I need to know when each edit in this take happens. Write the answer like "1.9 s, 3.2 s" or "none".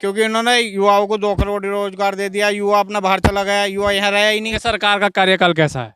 4.6 s